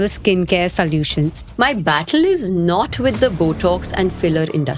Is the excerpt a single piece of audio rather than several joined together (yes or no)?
no